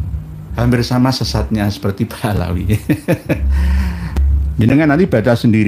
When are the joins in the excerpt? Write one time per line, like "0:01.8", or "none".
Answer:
0:04.1